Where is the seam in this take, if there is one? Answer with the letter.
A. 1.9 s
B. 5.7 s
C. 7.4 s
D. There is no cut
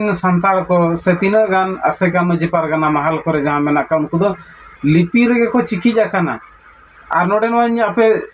D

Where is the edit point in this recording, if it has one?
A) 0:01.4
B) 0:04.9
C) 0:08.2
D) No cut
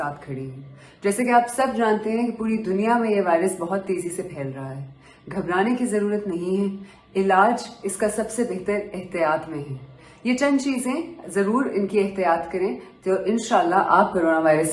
D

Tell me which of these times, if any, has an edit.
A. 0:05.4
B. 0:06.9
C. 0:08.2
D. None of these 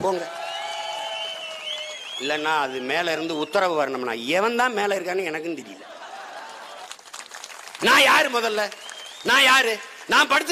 B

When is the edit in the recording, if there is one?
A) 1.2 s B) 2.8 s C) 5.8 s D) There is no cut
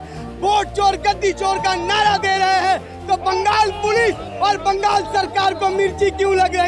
D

